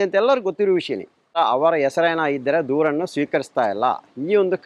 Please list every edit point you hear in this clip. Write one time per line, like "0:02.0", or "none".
0:01.4